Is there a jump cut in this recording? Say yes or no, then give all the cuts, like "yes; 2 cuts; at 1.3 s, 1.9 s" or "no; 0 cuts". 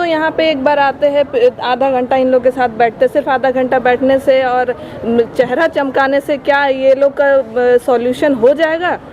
no; 0 cuts